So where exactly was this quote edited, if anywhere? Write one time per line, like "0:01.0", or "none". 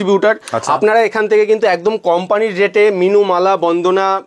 none